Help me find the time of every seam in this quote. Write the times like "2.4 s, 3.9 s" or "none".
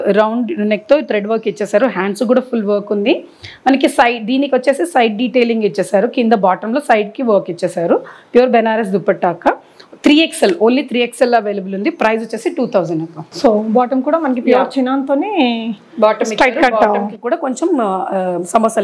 none

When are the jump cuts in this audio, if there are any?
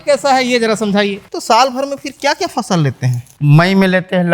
1.3 s, 3.2 s

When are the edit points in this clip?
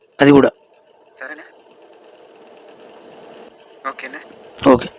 3.5 s

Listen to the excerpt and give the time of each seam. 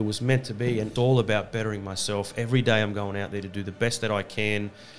0.9 s

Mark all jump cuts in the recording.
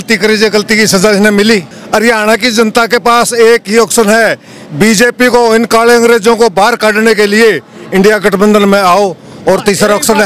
1.7 s

